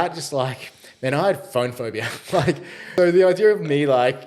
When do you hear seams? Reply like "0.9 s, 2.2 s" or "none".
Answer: 2.8 s